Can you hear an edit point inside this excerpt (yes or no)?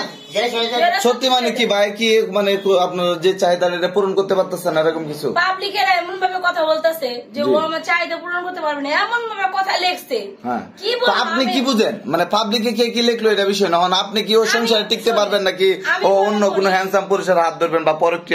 no